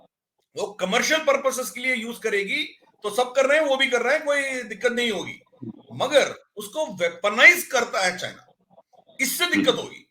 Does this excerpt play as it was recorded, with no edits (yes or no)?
yes